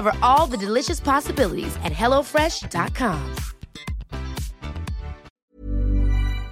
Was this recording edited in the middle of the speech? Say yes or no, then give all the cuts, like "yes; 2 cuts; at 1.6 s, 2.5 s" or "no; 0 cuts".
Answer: yes; 1 cut; at 5.3 s